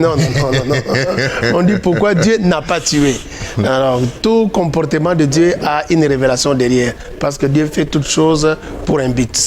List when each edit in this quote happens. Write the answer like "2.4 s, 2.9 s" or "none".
none

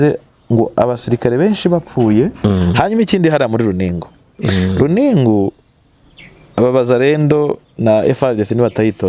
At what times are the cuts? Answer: 2.4 s

